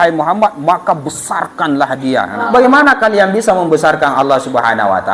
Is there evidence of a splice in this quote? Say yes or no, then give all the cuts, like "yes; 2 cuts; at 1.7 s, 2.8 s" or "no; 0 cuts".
yes; 1 cut; at 2.4 s